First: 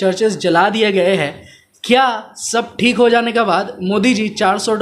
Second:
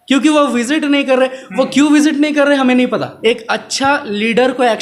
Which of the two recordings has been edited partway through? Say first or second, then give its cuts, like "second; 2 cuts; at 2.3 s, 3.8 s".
second; 1 cut; at 3.1 s